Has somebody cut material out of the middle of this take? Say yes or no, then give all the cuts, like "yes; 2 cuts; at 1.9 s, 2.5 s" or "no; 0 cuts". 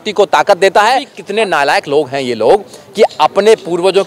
yes; 1 cut; at 1.2 s